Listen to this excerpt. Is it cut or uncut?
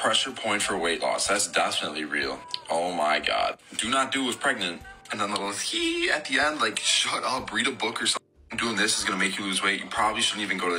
uncut